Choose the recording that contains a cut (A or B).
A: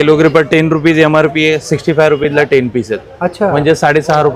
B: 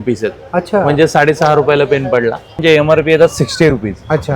B